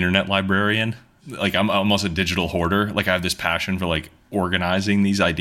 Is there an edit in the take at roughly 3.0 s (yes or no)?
no